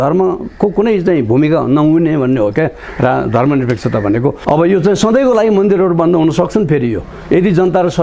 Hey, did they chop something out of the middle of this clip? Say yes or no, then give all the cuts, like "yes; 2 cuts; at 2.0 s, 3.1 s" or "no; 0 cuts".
yes; 1 cut; at 4.4 s